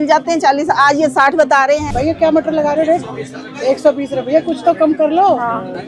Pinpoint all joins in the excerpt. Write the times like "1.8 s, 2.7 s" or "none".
1.8 s